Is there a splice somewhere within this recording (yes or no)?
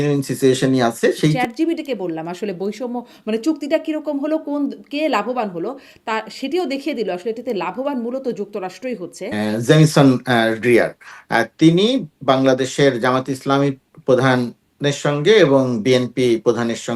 yes